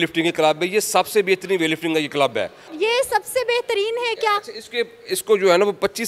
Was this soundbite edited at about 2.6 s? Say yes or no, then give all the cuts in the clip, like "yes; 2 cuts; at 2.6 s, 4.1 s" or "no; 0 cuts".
yes; 1 cut; at 2.6 s